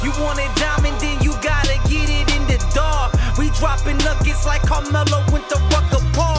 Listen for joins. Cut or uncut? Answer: uncut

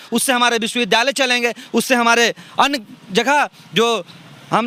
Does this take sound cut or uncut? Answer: uncut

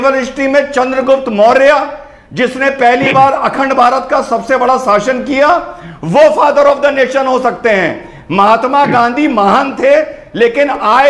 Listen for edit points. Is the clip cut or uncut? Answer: uncut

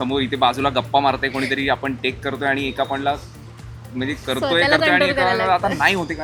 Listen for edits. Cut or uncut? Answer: uncut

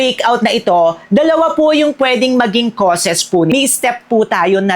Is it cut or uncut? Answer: cut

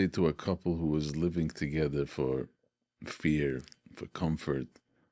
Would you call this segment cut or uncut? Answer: uncut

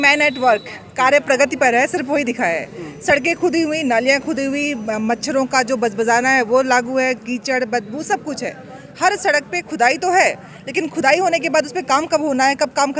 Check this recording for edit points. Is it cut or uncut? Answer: uncut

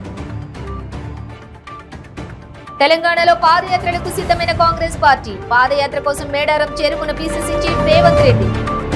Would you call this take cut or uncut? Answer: uncut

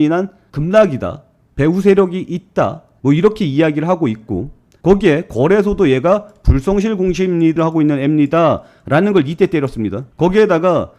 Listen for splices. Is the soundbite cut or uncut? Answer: cut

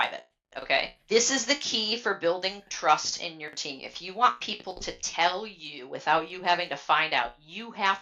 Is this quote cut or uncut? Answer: cut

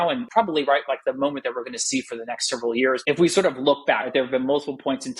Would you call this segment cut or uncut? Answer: cut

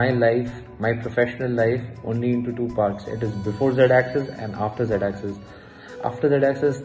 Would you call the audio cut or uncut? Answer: uncut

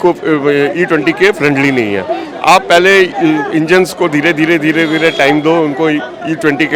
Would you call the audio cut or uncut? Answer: uncut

